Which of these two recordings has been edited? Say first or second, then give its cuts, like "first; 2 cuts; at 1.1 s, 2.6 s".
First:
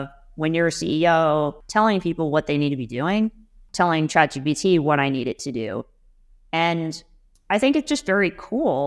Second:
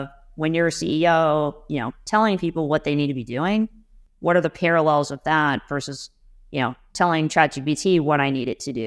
first; 2 cuts; at 1.6 s, 3.6 s